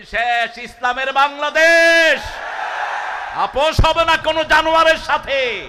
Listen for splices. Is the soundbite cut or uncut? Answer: uncut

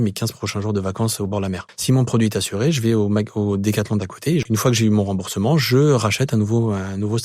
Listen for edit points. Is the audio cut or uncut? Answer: cut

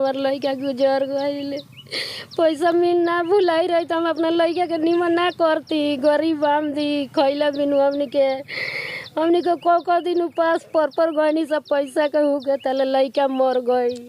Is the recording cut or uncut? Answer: uncut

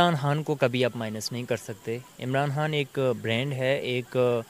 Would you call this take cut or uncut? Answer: uncut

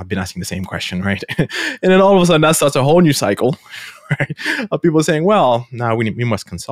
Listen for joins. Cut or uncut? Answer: uncut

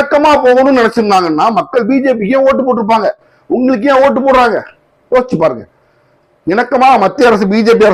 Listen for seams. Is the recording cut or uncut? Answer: uncut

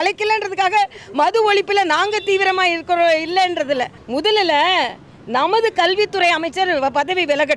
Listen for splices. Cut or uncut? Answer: cut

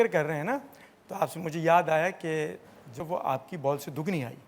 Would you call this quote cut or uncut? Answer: cut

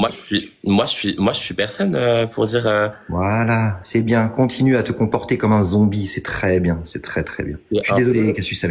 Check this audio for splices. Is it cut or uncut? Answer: uncut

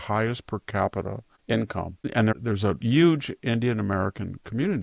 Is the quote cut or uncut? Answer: cut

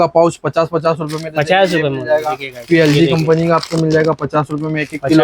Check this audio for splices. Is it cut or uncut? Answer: uncut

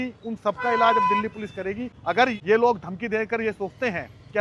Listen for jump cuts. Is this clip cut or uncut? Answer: cut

